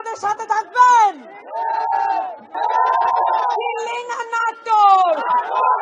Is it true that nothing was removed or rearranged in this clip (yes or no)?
no